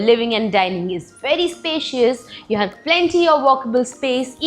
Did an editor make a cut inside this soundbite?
no; 0 cuts

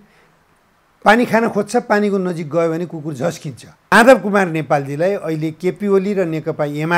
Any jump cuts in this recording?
yes; 1 cut; at 3.9 s

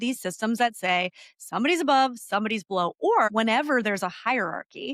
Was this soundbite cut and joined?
yes; 1 cut; at 3.3 s

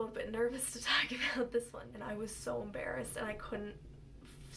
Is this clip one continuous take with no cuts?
no; 1 cut; at 1.8 s

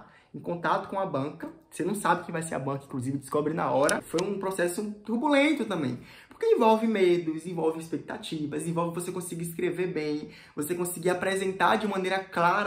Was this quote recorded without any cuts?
no; 1 cut; at 4.0 s

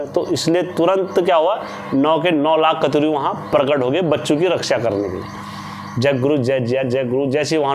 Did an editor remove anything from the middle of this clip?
no; 0 cuts

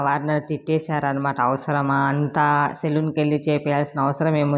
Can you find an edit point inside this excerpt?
no; 0 cuts

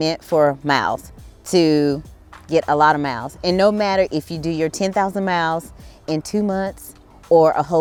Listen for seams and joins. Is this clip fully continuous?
yes; 0 cuts

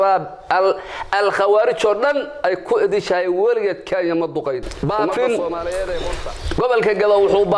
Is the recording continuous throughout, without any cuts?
no; 1 cut; at 4.6 s

